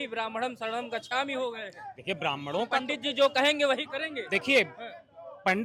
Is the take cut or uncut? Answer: uncut